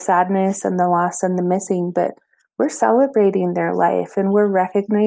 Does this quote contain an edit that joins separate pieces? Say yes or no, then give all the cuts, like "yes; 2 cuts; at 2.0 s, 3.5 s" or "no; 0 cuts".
no; 0 cuts